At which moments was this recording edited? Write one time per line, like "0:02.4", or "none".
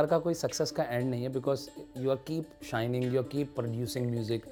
none